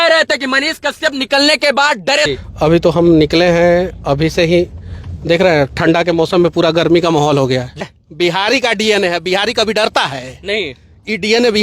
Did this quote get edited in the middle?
yes; 2 cuts; at 2.3 s, 7.8 s

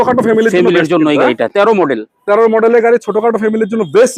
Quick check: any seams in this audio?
no; 0 cuts

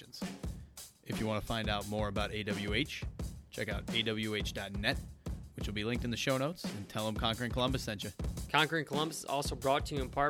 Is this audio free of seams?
no; 1 cut; at 8.4 s

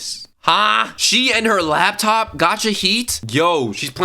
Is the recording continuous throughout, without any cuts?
no; 1 cut; at 0.9 s

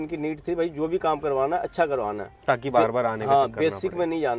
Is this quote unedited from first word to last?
yes; 0 cuts

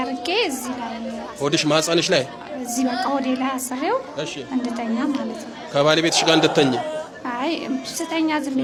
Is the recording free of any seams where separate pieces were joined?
yes; 0 cuts

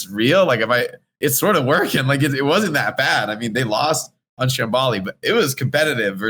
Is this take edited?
no; 0 cuts

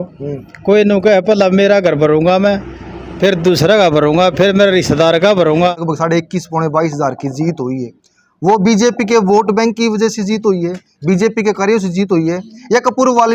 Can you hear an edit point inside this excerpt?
yes; 1 cut; at 5.8 s

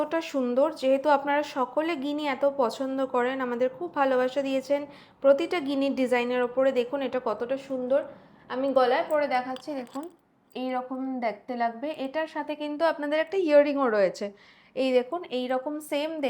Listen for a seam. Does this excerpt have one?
no; 0 cuts

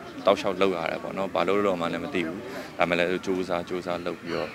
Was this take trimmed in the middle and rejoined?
no; 0 cuts

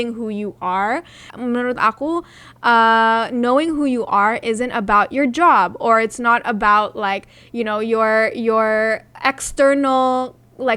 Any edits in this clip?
yes; 1 cut; at 1.3 s

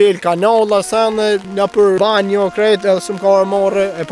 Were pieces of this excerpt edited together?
yes; 1 cut; at 1.9 s

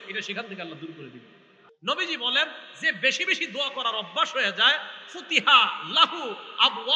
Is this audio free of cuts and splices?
no; 1 cut; at 1.7 s

